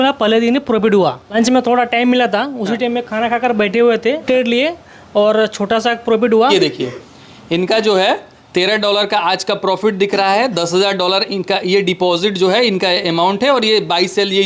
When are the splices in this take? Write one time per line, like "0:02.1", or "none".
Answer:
0:01.2
0:04.2
0:06.5